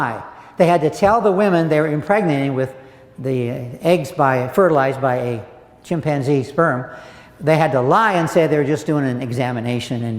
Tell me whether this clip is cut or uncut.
uncut